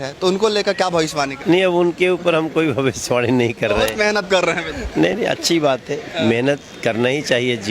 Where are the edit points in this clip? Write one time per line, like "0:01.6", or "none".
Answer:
0:01.4
0:04.7